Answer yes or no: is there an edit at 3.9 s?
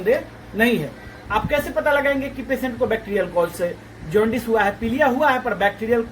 no